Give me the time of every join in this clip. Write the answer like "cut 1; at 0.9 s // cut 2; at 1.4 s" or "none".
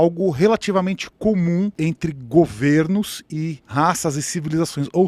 cut 1; at 1.7 s // cut 2; at 3.6 s

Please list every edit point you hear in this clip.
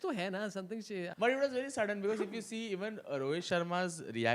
cut 1; at 1.1 s

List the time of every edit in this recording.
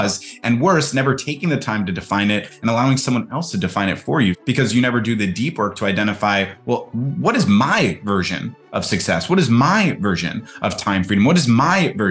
cut 1; at 4.4 s

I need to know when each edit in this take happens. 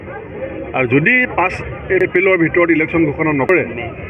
cut 1; at 2.0 s

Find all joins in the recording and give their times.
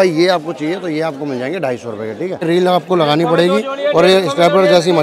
cut 1; at 2.4 s

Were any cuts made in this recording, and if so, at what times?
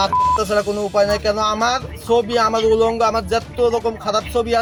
none

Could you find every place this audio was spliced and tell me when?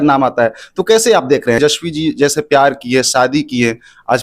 cut 1; at 1.6 s

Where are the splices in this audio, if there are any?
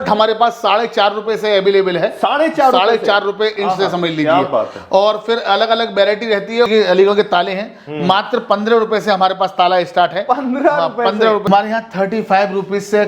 cut 1; at 6.7 s // cut 2; at 11.4 s

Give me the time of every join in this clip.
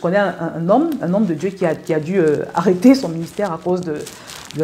none

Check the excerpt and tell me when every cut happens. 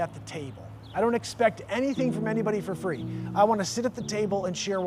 none

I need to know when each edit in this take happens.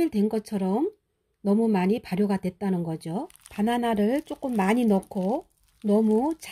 cut 1; at 3.4 s

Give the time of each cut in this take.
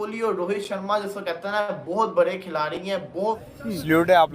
cut 1; at 3.4 s

